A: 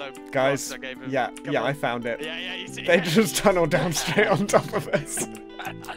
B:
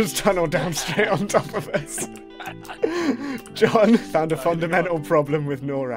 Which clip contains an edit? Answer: B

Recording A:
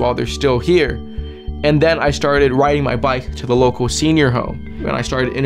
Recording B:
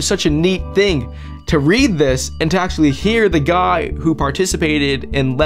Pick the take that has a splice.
A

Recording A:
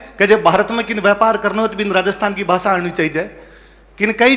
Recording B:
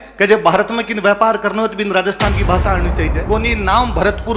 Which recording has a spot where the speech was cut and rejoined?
B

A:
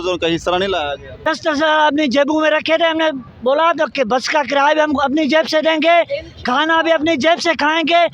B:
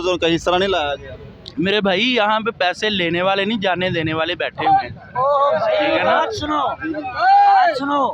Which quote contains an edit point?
A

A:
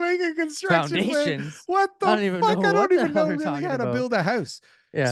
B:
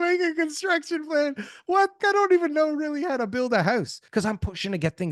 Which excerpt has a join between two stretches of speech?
B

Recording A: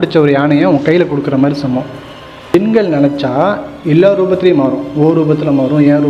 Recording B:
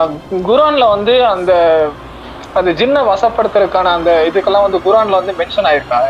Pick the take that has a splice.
A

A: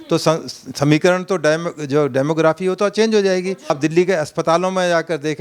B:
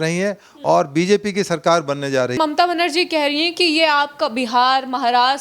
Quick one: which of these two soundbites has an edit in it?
B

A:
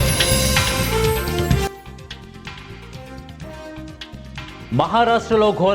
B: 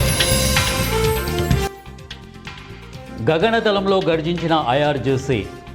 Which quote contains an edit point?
B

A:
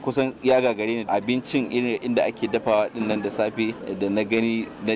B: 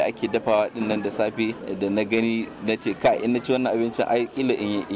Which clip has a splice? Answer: A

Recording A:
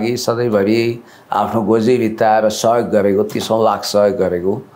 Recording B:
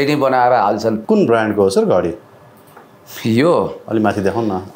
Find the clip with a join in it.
B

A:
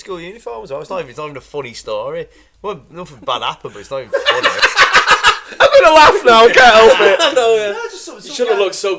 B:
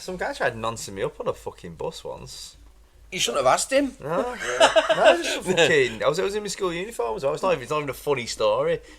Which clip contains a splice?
B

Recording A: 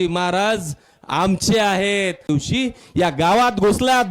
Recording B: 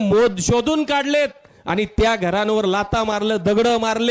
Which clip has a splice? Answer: A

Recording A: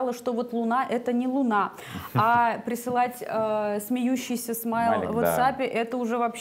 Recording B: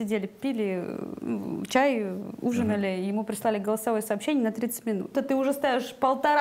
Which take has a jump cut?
B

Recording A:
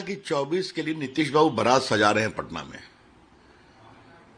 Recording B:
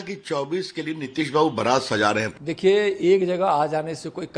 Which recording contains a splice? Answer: B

